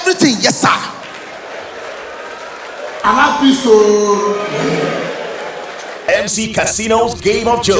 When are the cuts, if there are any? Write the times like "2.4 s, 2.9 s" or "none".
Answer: 6.1 s